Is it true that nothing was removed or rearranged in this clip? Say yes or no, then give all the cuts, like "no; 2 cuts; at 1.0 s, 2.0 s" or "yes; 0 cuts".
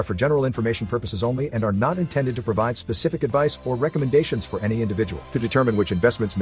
yes; 0 cuts